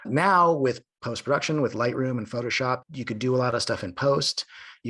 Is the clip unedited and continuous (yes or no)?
yes